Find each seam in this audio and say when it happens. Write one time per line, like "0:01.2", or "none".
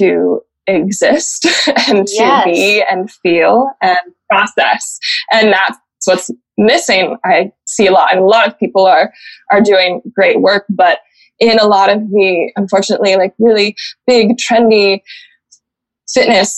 none